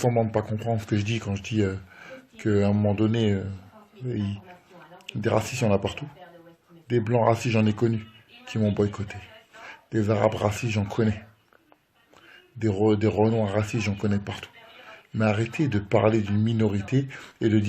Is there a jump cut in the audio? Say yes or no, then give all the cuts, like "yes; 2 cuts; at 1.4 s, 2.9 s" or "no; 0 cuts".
yes; 1 cut; at 6.8 s